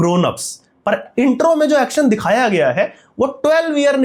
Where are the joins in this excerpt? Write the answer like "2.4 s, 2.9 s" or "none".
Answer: none